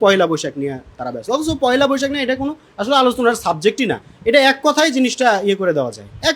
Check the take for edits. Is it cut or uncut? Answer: uncut